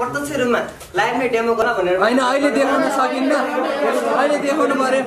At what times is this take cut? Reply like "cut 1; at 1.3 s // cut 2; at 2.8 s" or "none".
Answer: cut 1; at 1.6 s